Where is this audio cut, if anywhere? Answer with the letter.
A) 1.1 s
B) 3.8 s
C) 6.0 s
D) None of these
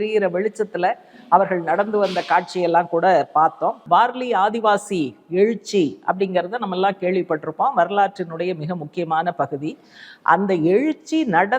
B